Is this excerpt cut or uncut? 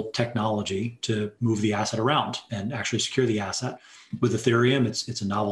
cut